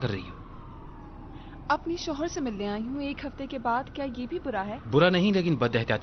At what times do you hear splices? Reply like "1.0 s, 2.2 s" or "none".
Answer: none